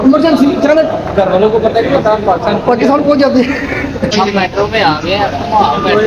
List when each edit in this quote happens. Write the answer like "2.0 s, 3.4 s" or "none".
4.1 s